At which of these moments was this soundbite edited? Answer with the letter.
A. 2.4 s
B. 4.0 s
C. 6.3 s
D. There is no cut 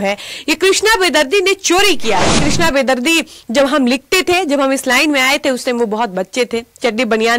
A